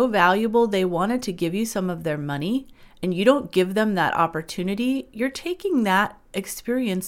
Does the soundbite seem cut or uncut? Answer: uncut